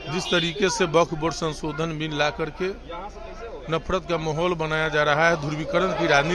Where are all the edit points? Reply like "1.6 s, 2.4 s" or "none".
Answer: none